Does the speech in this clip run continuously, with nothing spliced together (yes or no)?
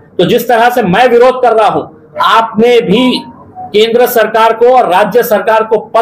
yes